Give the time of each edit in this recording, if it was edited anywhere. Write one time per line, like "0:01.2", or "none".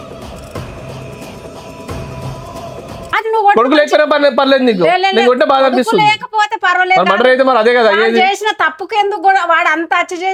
none